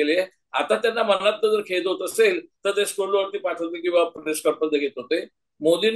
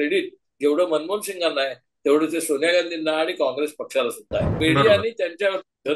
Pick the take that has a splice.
second; 1 cut; at 4.5 s

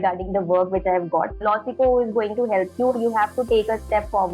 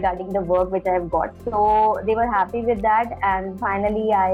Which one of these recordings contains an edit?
first; 1 cut; at 1.4 s

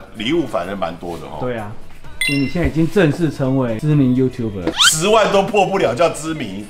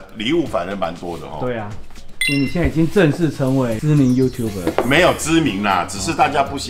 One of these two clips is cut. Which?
first; 1 cut; at 4.7 s

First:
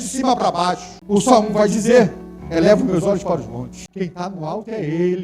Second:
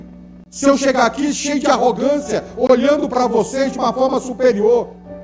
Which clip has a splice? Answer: first; 2 cuts; at 0.9 s, 3.8 s

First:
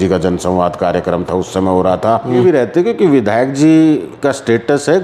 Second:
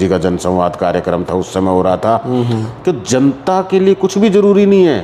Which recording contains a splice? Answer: first; 1 cut; at 2.4 s

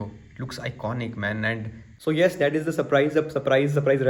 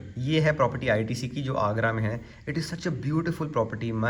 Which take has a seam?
first; 1 cut; at 2.0 s

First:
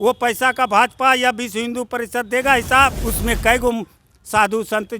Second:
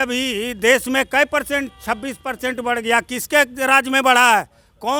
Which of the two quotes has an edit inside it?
first; 1 cut; at 3.0 s

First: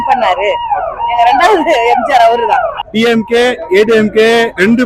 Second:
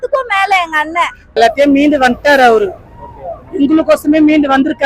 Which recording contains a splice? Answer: second; 1 cut; at 1.3 s

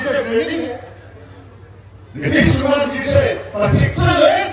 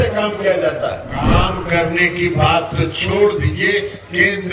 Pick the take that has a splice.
second; 1 cut; at 1.3 s

